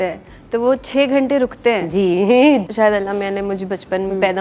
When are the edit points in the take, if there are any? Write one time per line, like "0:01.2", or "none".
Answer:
0:02.7